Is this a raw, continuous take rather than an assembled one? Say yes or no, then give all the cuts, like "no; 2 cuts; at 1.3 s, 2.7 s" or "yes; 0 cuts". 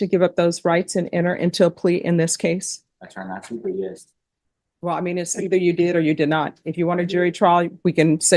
yes; 0 cuts